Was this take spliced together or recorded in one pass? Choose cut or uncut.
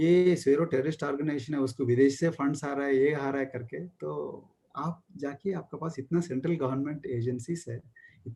uncut